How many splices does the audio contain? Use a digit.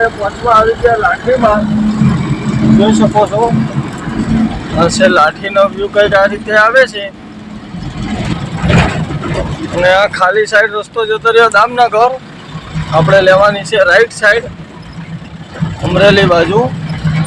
0